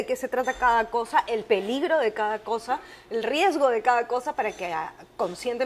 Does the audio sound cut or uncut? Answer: uncut